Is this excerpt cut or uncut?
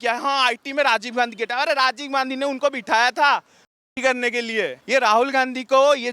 cut